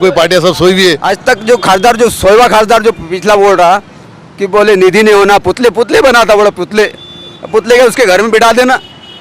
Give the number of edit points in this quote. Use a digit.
1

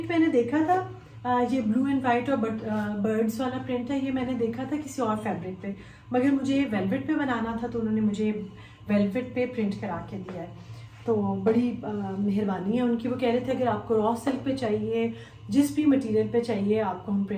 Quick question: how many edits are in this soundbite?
0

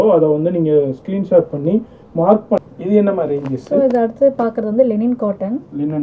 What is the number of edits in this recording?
1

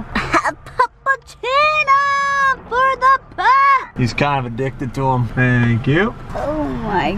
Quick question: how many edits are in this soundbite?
3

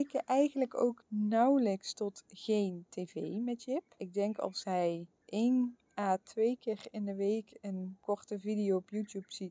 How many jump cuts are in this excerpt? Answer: 5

